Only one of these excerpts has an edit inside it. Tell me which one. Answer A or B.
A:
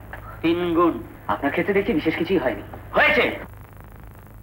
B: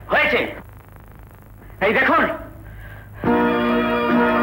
A